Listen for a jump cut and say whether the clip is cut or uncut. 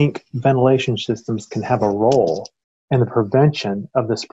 uncut